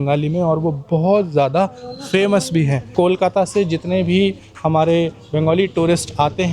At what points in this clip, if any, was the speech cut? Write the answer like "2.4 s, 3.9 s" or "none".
2.9 s

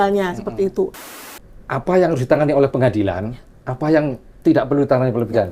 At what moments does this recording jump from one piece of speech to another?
1.0 s

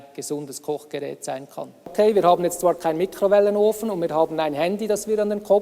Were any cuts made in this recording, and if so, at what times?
1.9 s

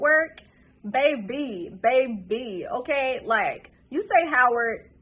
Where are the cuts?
none

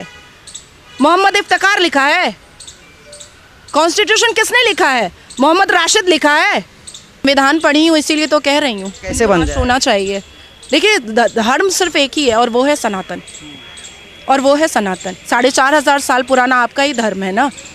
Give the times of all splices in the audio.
7.2 s

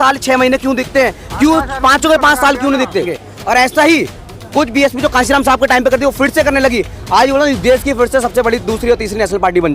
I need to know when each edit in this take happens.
3.2 s

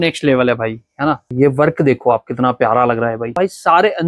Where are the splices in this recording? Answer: 1.3 s, 3.4 s

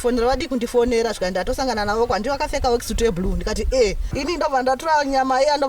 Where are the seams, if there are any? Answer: 4.1 s

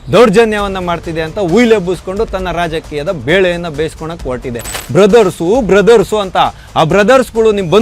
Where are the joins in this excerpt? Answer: 4.7 s

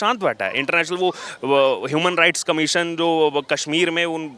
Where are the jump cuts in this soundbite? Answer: none

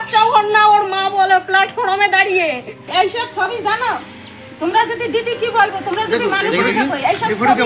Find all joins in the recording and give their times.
2.8 s

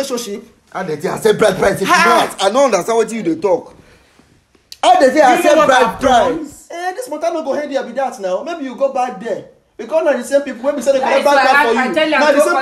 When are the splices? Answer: none

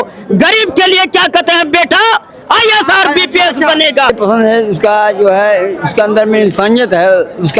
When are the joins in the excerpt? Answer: 4.1 s

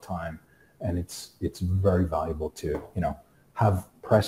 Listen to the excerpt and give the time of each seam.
none

